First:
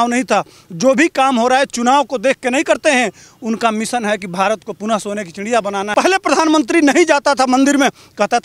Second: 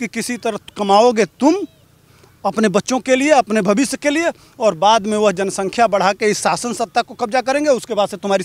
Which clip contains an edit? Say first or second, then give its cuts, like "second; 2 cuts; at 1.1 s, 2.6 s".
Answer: first; 1 cut; at 5.9 s